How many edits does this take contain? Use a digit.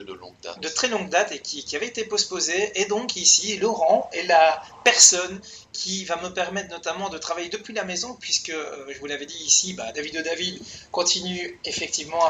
1